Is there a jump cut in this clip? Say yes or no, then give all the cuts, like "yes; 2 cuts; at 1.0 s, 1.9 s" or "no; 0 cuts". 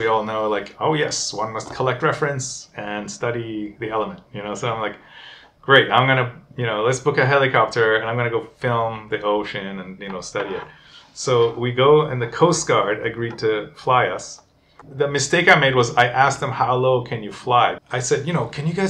yes; 2 cuts; at 14.8 s, 17.8 s